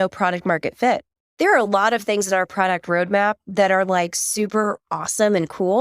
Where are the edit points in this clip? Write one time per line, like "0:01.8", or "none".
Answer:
0:01.3